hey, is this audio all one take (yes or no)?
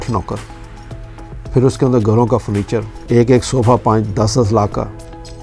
no